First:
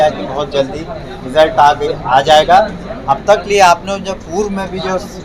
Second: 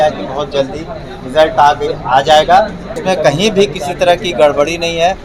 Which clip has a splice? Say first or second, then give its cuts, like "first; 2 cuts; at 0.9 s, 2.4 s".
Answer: second; 1 cut; at 2.9 s